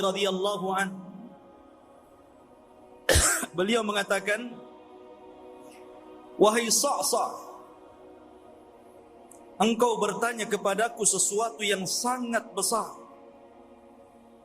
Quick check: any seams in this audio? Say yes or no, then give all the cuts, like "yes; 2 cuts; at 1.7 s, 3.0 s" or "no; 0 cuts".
yes; 6 cuts; at 1.6 s, 3.0 s, 4.9 s, 6.4 s, 7.6 s, 9.6 s